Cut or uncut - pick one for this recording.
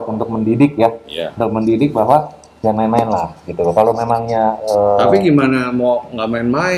uncut